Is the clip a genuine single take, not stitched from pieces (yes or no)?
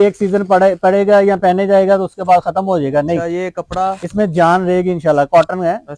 yes